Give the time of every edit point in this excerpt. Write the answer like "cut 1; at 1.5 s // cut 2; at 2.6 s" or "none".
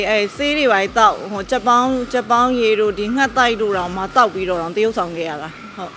none